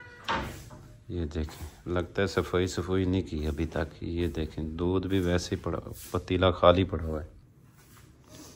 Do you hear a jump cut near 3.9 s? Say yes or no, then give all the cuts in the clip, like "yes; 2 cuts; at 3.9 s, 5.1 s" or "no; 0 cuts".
no; 1 cut; at 7.5 s